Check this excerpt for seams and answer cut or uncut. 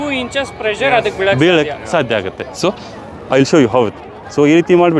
uncut